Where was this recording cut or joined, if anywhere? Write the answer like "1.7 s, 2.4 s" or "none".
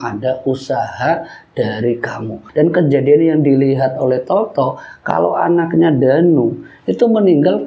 2.4 s